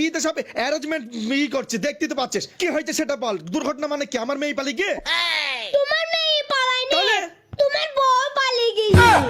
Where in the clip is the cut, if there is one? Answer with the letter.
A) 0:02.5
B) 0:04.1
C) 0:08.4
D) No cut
D